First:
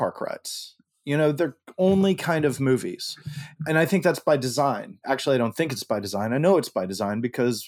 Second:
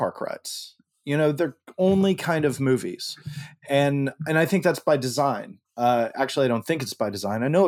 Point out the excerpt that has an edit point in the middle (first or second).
first